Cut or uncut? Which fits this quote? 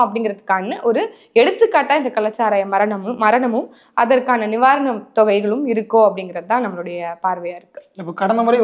uncut